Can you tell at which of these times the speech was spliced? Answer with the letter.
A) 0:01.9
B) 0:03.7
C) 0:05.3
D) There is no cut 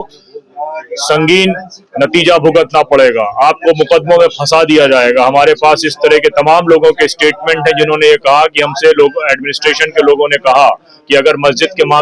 D